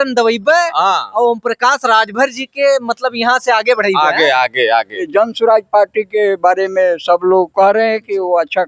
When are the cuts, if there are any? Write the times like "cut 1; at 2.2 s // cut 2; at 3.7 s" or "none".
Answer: cut 1; at 5.0 s